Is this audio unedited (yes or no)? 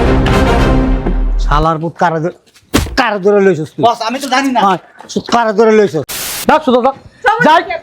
no